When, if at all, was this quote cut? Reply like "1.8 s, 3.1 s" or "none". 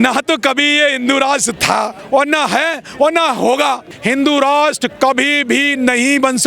2.0 s, 3.9 s